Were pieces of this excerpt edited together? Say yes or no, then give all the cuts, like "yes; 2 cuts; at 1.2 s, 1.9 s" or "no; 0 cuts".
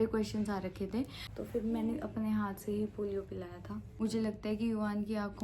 yes; 2 cuts; at 1.2 s, 3.8 s